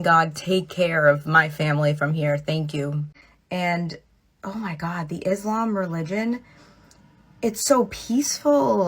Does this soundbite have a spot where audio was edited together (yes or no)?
yes